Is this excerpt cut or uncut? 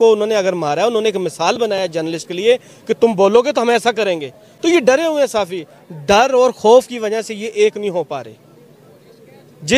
uncut